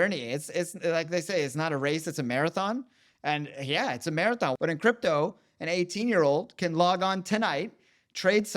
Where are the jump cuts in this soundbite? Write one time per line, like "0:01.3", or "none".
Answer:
0:04.6